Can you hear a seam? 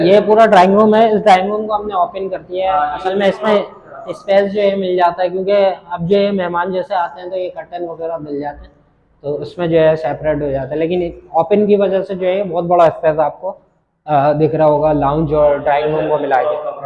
no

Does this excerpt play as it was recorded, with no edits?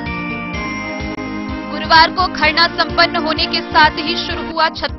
no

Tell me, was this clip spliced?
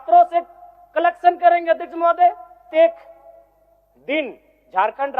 yes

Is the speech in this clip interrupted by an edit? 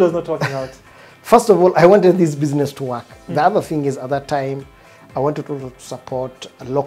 yes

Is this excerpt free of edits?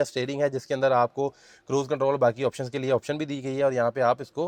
yes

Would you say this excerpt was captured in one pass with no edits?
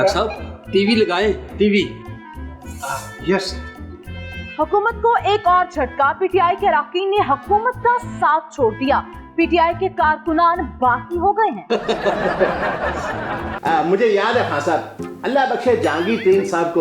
no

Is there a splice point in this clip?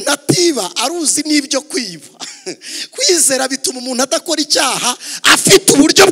no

